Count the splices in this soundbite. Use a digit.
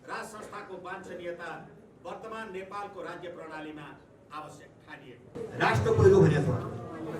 1